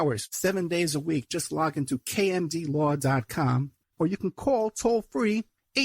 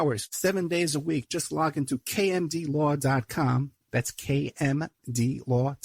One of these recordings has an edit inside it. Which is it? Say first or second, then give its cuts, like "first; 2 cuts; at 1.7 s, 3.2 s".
first; 1 cut; at 3.8 s